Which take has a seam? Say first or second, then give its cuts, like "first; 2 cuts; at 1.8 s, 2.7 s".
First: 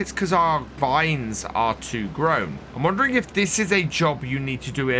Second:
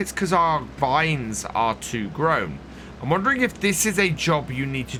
first; 1 cut; at 2.6 s